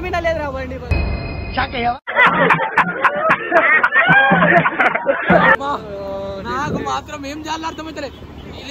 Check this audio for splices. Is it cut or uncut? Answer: uncut